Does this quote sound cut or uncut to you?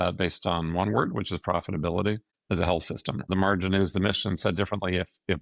cut